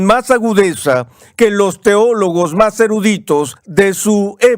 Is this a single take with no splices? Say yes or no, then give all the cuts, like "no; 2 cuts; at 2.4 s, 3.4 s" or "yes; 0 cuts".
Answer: no; 1 cut; at 3.6 s